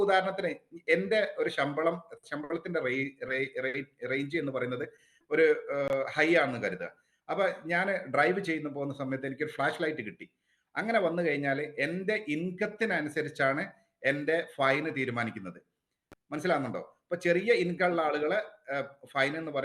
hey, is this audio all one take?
yes; 0 cuts

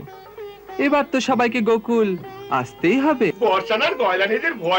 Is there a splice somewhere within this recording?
yes; 1 cut; at 3.3 s

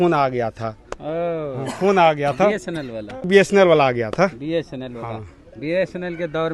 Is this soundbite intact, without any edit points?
no; 1 cut; at 3.3 s

